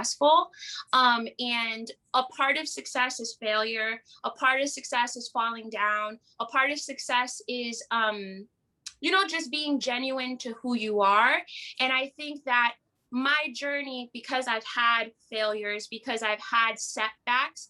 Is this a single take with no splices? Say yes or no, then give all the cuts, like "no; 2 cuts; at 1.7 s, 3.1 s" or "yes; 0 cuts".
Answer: yes; 0 cuts